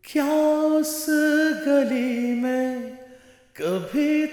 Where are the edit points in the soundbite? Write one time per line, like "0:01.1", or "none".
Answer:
none